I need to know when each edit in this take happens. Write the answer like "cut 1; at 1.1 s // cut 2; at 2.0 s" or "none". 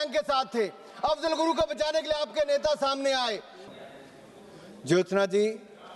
cut 1; at 3.7 s

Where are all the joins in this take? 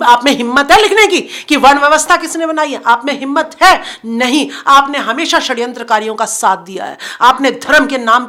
none

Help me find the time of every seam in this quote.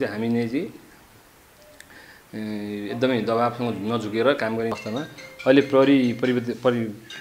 cut 1; at 4.7 s

